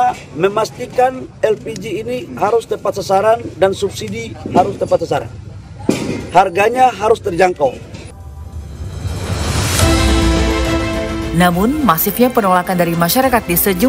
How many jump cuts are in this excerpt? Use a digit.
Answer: 0